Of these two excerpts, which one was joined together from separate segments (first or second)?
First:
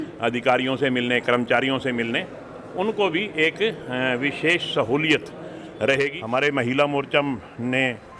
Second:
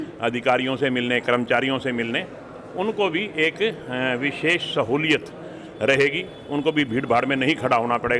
first